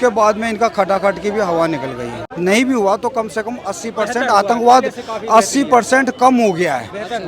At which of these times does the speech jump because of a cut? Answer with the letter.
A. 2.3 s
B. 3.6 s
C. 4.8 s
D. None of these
A